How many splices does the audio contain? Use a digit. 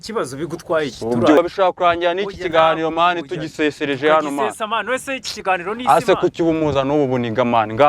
1